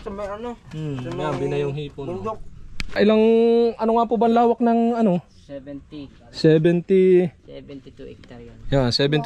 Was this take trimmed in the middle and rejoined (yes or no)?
yes